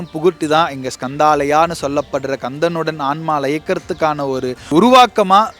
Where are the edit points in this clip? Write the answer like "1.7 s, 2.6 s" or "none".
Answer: 4.7 s